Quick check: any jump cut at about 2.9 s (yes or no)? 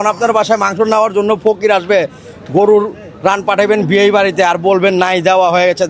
no